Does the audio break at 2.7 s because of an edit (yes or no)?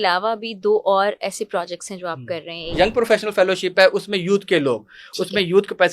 yes